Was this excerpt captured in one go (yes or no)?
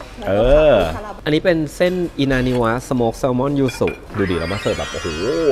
no